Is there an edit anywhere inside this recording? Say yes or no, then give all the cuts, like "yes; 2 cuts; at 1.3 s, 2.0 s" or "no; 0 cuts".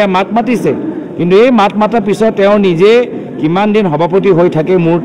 no; 0 cuts